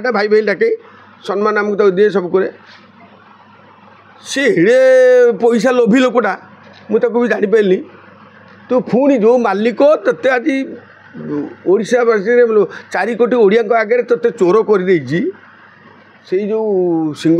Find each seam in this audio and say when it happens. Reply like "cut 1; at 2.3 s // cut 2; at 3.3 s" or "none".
none